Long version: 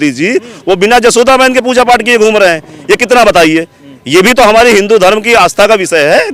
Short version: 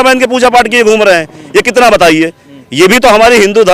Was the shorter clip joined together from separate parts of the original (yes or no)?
no